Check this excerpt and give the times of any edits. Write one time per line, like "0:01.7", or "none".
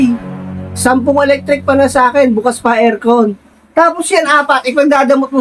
none